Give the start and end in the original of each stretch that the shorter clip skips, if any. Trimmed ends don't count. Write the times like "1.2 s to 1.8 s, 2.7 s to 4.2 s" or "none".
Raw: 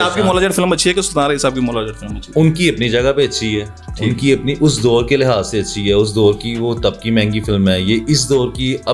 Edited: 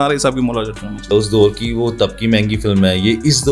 2.3 s to 5.9 s